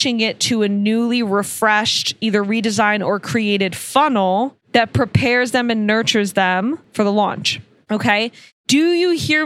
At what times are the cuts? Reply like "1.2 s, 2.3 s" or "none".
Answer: 4.6 s